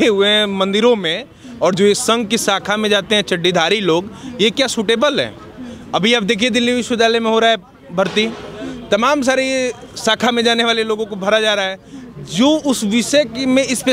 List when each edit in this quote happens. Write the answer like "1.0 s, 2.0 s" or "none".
none